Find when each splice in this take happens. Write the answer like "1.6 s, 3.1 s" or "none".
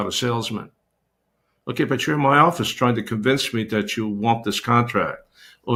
none